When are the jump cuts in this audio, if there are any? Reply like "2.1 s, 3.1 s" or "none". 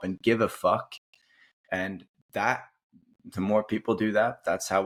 none